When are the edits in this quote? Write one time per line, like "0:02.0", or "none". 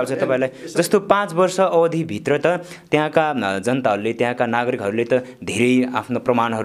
none